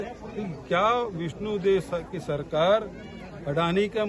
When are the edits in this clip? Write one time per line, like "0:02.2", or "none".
none